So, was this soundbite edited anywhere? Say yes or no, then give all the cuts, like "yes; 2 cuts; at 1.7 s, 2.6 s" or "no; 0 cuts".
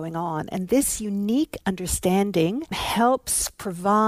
yes; 1 cut; at 2.8 s